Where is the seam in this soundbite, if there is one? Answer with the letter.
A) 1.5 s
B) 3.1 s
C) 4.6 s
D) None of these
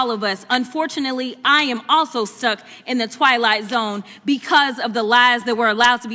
D